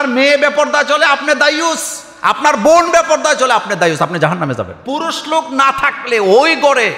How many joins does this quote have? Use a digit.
1